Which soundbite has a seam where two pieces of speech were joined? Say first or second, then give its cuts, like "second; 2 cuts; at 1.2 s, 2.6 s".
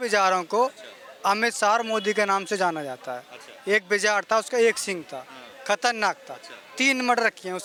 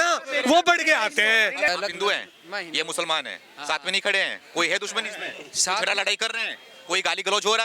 second; 1 cut; at 1.7 s